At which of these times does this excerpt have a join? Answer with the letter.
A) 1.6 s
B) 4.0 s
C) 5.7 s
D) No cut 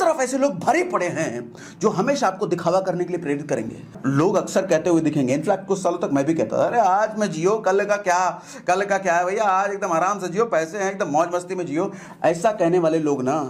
B